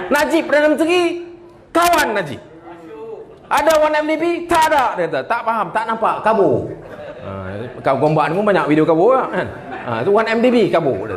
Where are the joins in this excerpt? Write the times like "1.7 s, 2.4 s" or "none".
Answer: none